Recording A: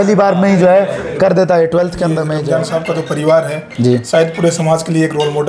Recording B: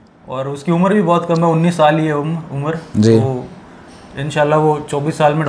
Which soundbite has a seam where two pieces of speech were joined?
A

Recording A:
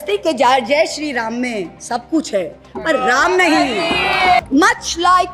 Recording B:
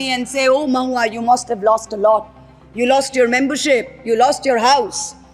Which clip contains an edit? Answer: A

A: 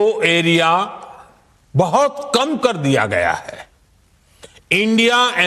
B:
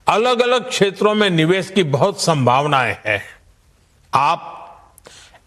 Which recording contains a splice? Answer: A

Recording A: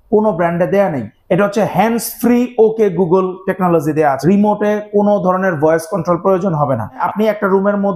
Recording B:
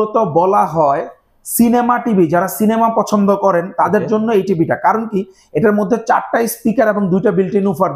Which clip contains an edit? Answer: A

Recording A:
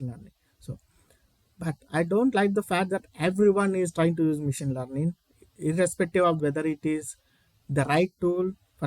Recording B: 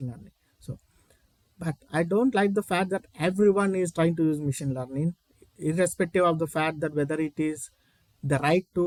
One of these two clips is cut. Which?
A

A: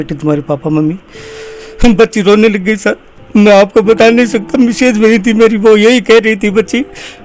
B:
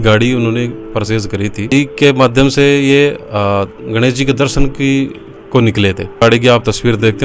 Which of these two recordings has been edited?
B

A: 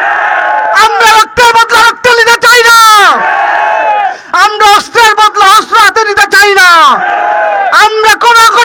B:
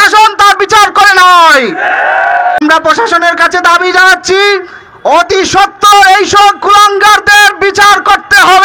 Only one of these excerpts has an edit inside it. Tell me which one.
B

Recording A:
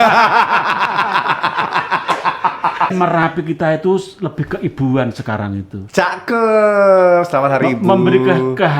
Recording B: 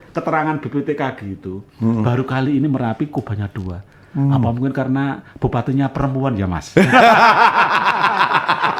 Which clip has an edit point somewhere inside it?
A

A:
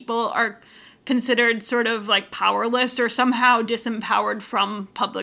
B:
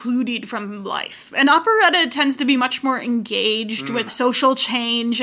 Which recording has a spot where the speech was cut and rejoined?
B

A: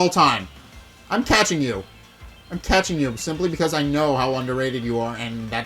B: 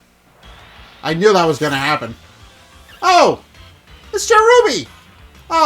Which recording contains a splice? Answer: B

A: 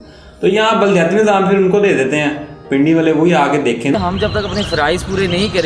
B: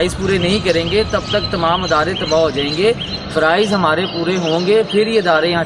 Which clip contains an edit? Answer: A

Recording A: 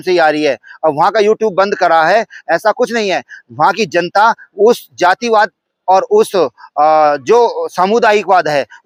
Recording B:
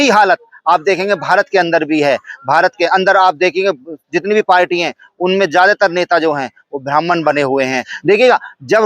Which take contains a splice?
B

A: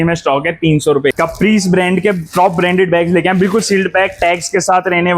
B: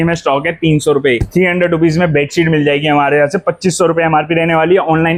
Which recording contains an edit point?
A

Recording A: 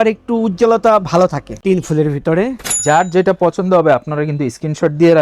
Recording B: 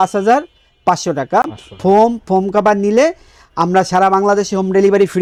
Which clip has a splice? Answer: A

